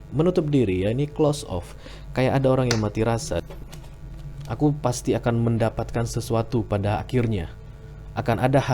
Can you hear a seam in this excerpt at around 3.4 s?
yes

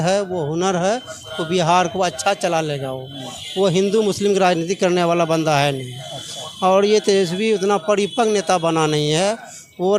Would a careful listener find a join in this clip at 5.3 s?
no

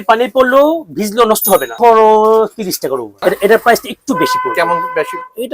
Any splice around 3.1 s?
yes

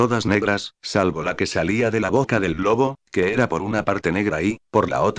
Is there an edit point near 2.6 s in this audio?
no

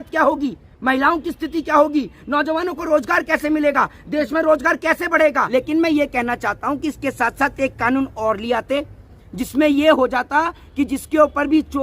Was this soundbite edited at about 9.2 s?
no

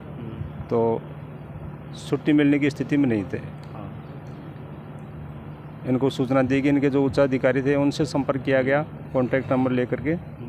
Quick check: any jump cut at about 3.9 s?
no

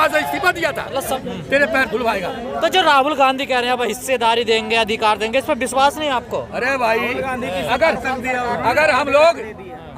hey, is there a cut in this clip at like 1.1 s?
yes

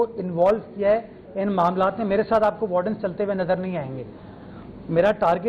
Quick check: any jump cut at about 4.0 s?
no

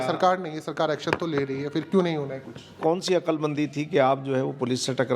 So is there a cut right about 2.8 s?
yes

